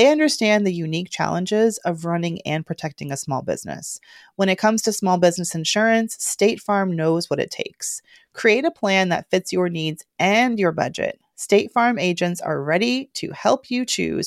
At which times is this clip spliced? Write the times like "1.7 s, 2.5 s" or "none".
none